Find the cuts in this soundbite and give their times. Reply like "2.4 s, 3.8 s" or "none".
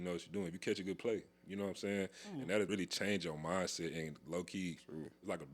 2.7 s